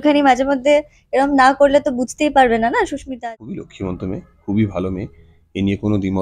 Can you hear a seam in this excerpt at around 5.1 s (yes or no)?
no